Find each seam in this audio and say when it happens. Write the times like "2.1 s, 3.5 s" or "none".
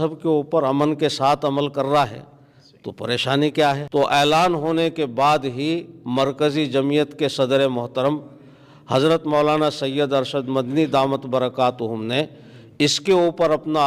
3.8 s